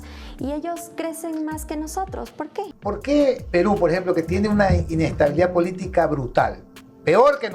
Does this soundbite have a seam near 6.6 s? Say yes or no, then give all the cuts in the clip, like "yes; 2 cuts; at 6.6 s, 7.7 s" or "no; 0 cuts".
no; 1 cut; at 2.7 s